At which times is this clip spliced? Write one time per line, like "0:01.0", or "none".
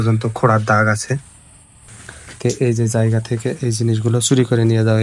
0:01.5